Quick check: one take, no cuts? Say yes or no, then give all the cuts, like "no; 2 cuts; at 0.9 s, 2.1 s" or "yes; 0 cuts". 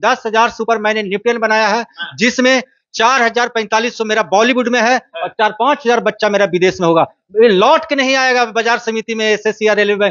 yes; 0 cuts